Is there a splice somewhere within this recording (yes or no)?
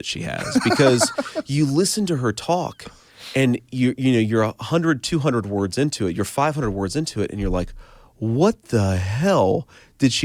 no